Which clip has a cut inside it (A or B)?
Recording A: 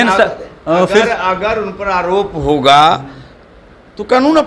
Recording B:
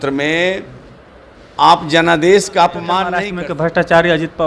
B